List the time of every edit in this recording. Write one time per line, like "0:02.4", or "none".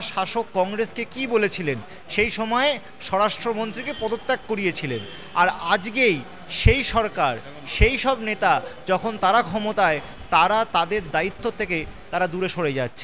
none